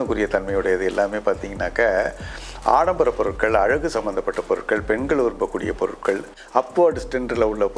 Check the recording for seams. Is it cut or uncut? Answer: cut